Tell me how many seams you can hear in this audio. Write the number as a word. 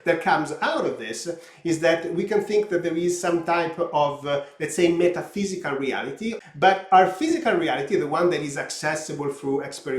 one